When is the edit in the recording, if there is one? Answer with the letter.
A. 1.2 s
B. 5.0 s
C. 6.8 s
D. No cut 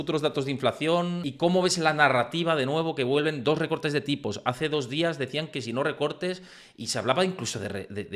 A